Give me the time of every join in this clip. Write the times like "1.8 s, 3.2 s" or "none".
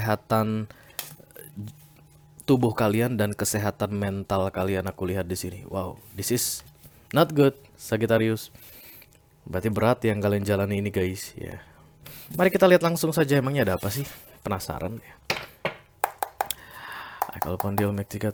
none